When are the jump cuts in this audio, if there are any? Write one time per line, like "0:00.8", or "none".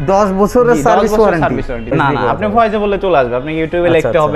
0:02.0